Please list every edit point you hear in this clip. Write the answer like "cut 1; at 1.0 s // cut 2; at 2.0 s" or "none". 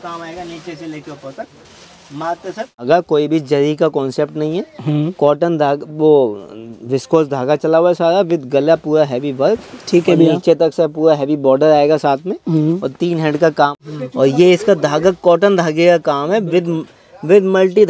cut 1; at 2.8 s // cut 2; at 13.8 s